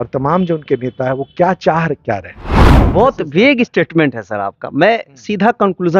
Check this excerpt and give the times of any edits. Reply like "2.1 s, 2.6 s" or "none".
2.7 s